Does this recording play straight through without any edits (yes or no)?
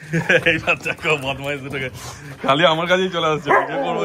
yes